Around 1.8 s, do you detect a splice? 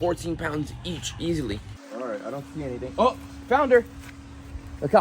yes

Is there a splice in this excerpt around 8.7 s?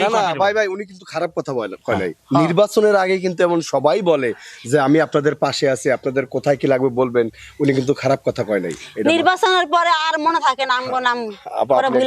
no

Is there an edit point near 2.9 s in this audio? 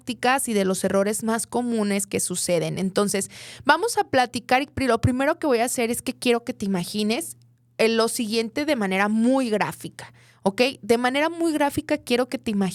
no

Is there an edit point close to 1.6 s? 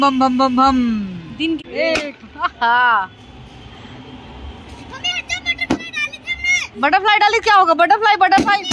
yes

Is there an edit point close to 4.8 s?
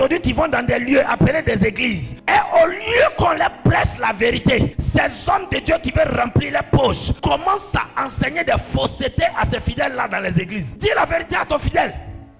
yes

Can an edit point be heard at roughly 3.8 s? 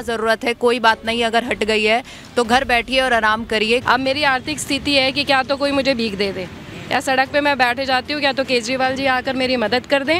yes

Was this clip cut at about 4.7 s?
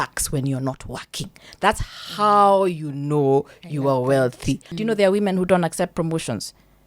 yes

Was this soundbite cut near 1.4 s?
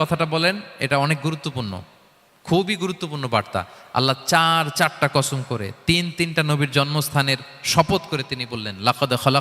yes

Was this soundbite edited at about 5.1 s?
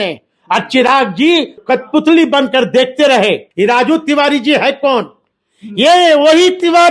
no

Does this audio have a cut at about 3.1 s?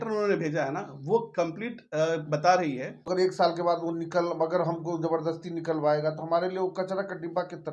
yes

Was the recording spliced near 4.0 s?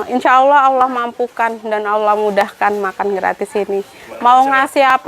yes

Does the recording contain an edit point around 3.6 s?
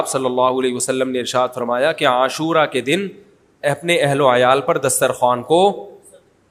no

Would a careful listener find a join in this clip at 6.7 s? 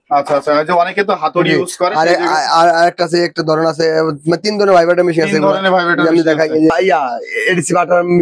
yes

